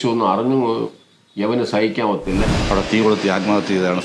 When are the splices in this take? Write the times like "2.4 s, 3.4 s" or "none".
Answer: 2.5 s